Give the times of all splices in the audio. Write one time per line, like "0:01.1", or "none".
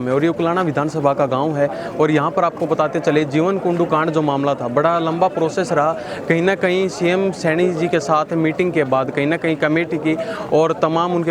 none

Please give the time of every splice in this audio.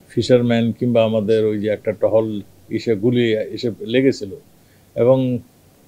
none

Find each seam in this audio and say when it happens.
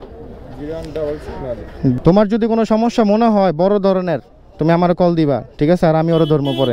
0:02.0

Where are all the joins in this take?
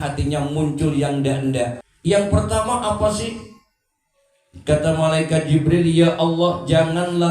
0:01.9

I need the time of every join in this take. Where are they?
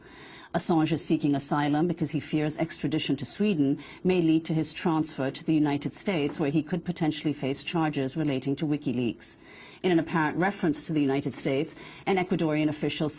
0:09.2

